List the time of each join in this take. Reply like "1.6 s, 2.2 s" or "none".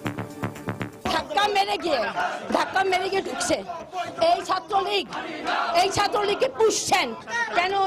none

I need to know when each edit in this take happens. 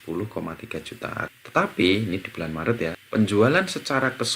1.3 s, 3.0 s

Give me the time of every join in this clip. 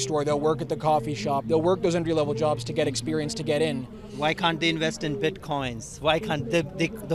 none

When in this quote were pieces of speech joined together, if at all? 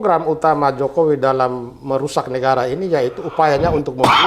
none

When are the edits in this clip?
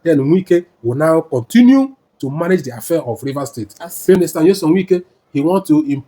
4.2 s

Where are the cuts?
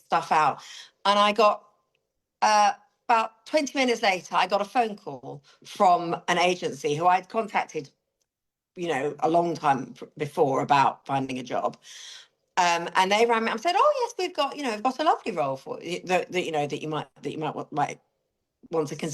none

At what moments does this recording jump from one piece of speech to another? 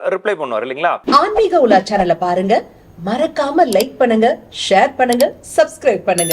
1.0 s

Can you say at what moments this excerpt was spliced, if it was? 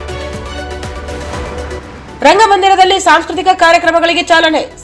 none

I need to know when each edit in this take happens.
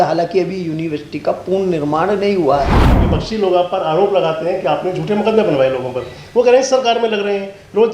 2.9 s

